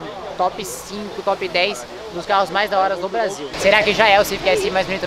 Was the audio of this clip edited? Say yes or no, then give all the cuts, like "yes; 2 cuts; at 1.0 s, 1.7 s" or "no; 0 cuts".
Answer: yes; 1 cut; at 3.5 s